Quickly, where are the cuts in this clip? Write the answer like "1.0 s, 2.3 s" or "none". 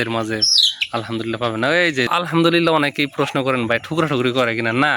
2.1 s

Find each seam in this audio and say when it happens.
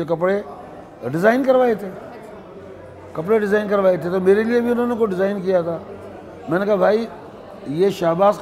none

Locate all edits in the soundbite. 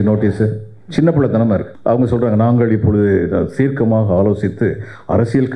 1.7 s

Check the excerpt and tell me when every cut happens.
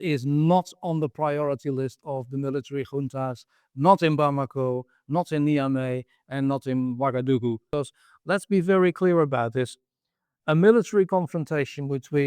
7.7 s

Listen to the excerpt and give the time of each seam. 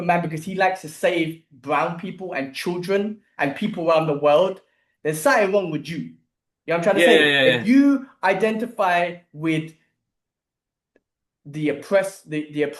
none

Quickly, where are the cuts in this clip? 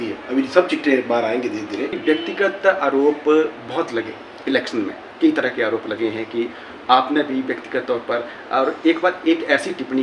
1.9 s

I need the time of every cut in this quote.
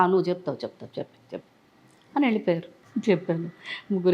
2.8 s

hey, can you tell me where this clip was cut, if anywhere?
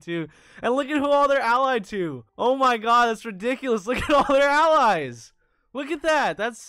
2.2 s

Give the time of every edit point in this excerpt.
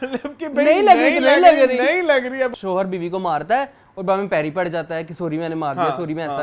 2.5 s

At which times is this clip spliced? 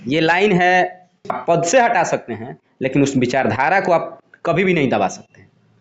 1.3 s

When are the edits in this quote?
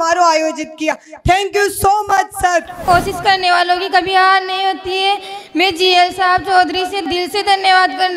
2.7 s, 7.0 s

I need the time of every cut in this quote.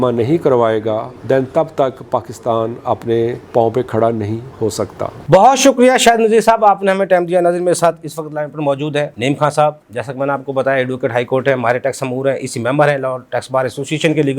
none

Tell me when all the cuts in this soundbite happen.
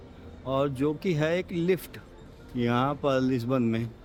none

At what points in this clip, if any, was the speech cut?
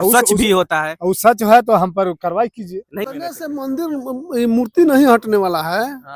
3.1 s

